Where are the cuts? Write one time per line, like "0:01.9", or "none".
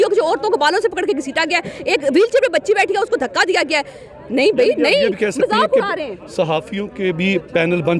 none